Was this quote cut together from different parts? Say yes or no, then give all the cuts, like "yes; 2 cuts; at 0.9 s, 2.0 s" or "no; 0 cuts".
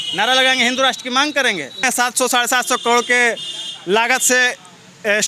yes; 1 cut; at 1.8 s